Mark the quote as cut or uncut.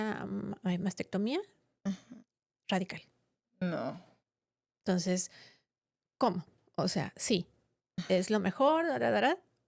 uncut